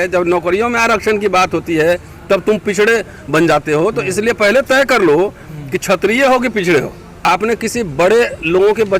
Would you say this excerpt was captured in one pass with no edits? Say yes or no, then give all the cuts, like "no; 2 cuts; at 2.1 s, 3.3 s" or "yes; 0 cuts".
no; 1 cut; at 7.0 s